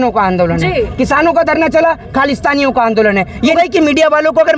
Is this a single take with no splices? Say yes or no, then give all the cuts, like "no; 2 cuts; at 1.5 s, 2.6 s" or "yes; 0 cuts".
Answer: no; 1 cut; at 3.5 s